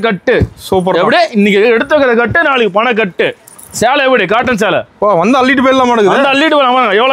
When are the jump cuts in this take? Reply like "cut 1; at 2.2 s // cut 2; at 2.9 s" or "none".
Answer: none